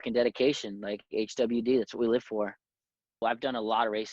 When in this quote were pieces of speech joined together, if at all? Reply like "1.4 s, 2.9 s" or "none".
3.2 s